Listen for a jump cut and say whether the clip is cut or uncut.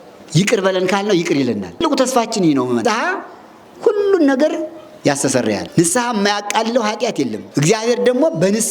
cut